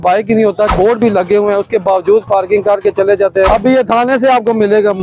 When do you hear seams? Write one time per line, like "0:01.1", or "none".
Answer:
0:00.7
0:03.5